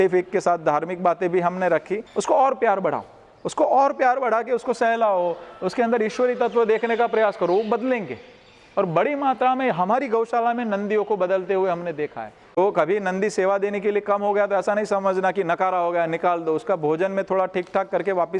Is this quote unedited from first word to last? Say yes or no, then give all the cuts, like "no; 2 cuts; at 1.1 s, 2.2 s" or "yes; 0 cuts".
no; 2 cuts; at 2.0 s, 12.6 s